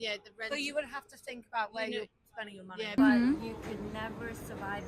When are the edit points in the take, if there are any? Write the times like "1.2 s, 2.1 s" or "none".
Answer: 3.0 s